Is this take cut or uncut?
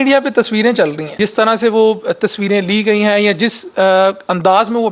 cut